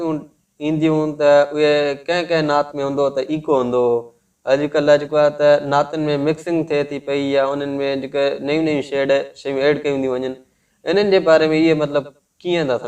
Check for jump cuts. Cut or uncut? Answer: uncut